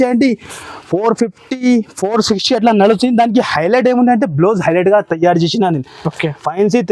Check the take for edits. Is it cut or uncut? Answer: uncut